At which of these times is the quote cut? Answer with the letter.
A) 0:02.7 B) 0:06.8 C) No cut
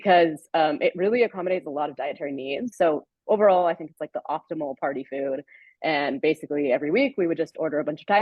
A